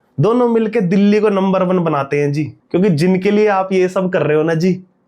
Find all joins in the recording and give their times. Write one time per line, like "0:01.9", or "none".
0:02.5